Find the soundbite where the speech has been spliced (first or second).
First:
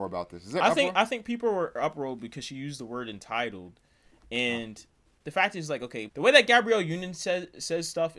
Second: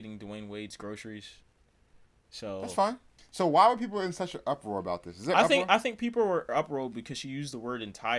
second